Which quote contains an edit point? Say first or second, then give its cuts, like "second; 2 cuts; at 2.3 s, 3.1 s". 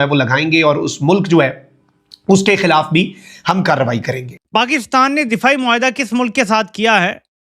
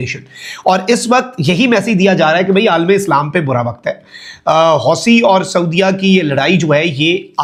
first; 1 cut; at 4.3 s